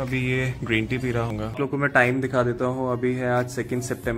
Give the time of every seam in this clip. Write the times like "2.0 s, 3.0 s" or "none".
1.3 s